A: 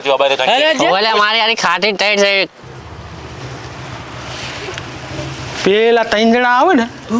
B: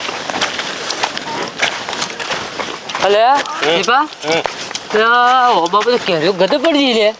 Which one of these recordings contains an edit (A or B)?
A